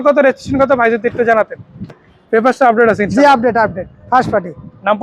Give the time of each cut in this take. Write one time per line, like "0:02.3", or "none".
0:02.1